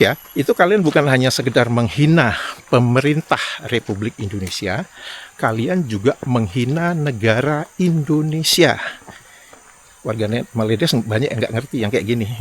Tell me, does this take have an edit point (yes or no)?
no